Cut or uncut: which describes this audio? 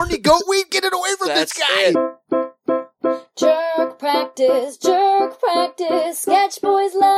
cut